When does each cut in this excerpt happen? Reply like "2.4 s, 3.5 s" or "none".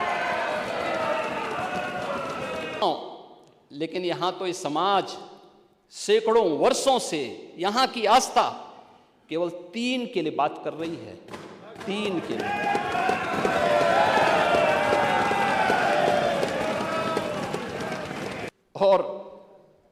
2.8 s, 18.5 s